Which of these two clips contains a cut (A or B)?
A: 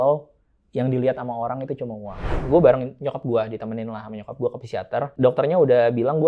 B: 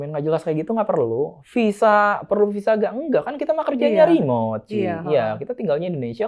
A